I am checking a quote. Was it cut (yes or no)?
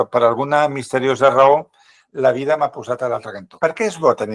yes